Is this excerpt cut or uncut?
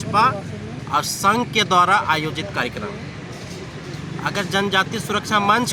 uncut